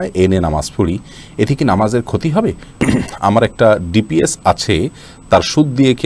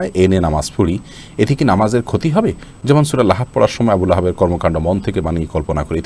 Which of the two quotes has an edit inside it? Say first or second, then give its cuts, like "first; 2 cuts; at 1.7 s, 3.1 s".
first; 1 cut; at 2.8 s